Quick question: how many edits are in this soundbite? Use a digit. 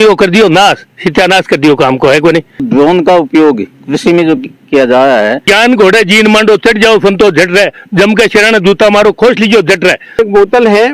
3